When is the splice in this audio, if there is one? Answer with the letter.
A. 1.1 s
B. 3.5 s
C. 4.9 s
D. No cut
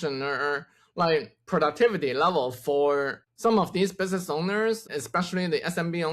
C